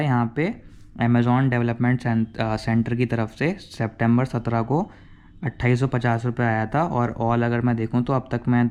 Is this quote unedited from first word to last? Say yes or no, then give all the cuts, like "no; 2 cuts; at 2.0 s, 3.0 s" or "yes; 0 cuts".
yes; 0 cuts